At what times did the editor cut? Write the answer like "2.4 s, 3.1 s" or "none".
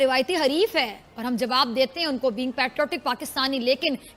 none